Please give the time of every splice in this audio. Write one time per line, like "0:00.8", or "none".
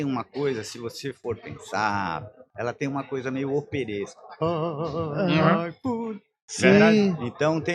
none